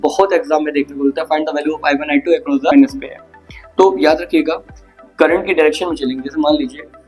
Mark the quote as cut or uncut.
cut